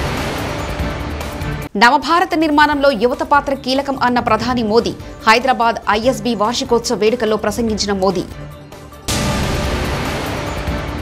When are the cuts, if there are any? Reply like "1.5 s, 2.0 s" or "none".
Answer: 1.6 s